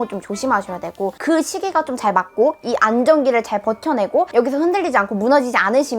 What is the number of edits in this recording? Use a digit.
1